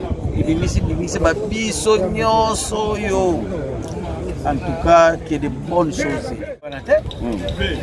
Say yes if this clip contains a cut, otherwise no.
yes